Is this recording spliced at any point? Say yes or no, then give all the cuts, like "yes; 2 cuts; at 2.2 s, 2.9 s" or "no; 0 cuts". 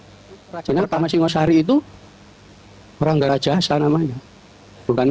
yes; 1 cut; at 1.5 s